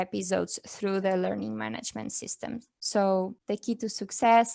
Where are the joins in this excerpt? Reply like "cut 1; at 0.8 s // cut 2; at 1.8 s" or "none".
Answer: cut 1; at 2.7 s // cut 2; at 3.4 s